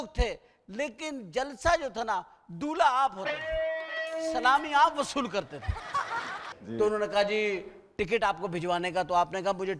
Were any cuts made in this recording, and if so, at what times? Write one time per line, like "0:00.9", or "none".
0:06.5